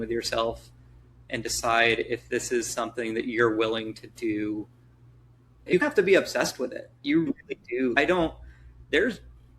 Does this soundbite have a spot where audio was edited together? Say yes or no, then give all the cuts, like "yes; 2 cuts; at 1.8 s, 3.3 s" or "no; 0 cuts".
yes; 1 cut; at 5.7 s